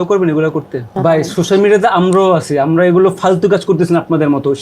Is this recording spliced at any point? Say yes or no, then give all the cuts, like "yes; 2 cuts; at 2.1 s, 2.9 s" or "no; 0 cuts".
yes; 1 cut; at 0.9 s